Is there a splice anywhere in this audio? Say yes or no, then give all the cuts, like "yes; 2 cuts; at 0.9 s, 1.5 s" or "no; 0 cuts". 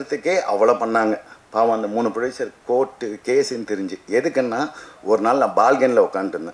no; 0 cuts